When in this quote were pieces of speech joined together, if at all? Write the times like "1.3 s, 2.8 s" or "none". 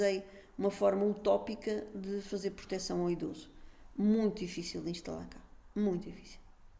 none

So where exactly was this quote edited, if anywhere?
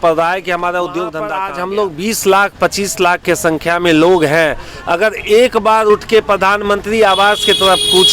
1.3 s

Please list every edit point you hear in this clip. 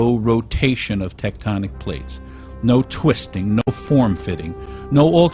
4.4 s

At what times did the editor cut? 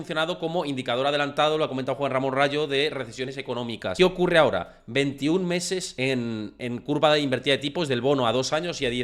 3.9 s, 5.9 s

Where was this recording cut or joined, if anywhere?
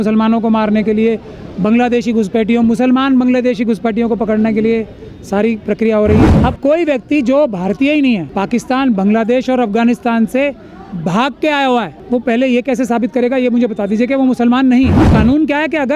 6.3 s, 8.3 s, 12.0 s, 15.0 s

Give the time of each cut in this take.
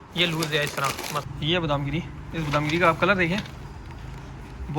1.2 s

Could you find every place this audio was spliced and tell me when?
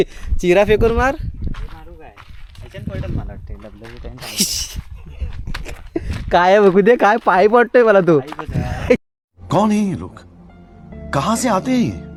none

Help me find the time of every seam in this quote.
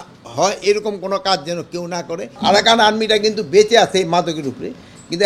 2.2 s

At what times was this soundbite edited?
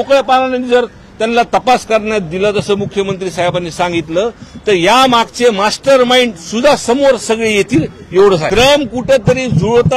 8.5 s

